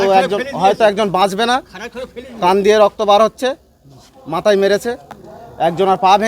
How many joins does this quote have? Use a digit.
1